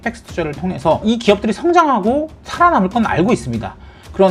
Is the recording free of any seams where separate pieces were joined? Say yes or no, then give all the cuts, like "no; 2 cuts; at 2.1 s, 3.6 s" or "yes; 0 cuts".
no; 2 cuts; at 1.0 s, 2.4 s